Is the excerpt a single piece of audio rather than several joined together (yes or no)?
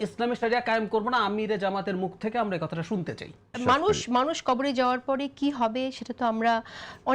no